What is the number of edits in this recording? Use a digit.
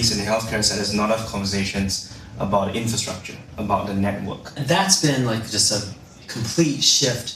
1